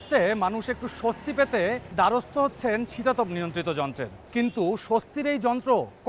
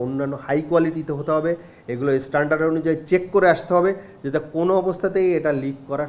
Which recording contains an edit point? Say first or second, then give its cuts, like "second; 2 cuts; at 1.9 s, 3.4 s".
first; 2 cuts; at 1.8 s, 4.1 s